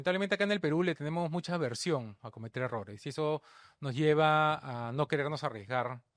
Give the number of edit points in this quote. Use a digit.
0